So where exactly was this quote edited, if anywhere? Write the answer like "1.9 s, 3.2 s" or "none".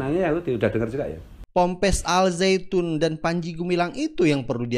1.4 s